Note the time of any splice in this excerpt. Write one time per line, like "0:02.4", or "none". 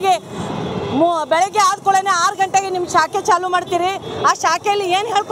none